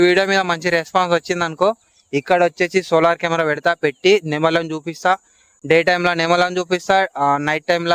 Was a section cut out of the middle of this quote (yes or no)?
no